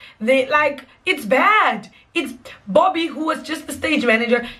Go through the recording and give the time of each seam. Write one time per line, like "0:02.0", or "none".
none